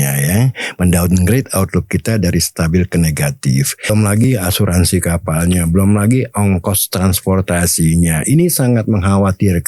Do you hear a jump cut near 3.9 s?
yes; 1 cut; at 3.9 s

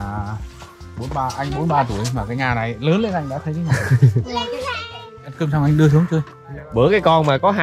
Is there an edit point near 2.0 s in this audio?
no; 2 cuts; at 5.0 s, 6.4 s

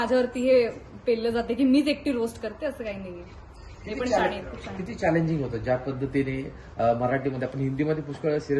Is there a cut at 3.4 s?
no; 0 cuts

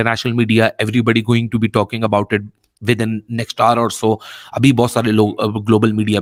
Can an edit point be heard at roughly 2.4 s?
no; 0 cuts

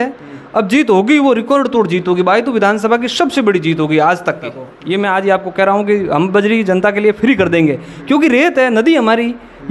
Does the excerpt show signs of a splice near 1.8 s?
no; 1 cut; at 4.7 s

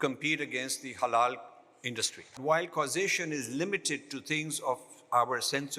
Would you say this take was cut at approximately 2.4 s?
yes; 1 cut; at 2.4 s

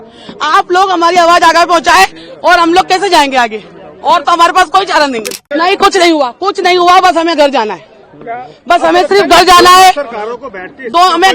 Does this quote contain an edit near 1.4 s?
no; 1 cut; at 5.3 s

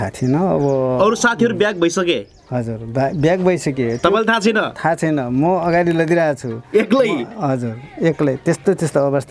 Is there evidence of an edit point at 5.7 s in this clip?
no; 0 cuts

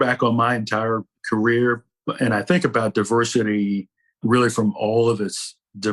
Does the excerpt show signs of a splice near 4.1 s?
no; 2 cuts; at 1.1 s, 1.9 s

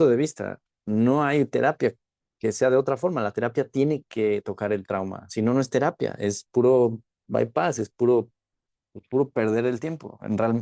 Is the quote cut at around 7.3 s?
no; 0 cuts

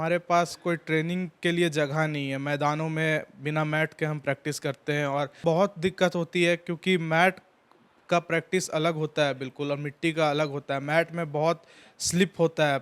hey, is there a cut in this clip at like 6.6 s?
no; 1 cut; at 5.4 s

